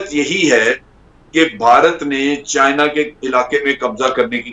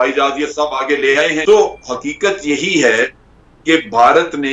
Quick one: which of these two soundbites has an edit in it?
second; 1 cut; at 1.4 s

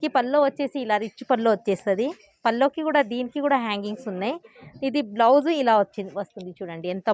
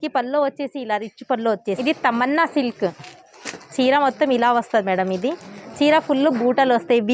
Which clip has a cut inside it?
second; 1 cut; at 1.8 s

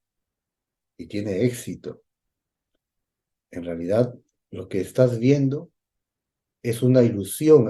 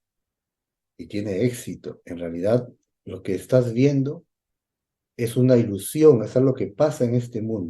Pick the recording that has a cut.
second; 1 cut; at 2.0 s

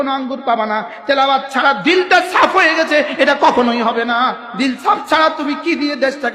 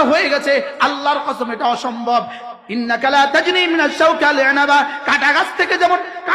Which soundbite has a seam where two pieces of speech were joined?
first; 1 cut; at 4.4 s

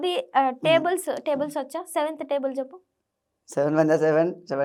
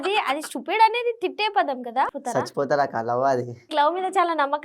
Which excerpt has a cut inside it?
second; 2 cuts; at 2.1 s, 3.7 s

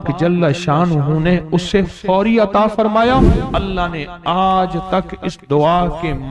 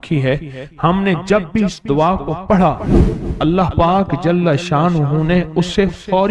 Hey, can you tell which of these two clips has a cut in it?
first; 1 cut; at 3.4 s

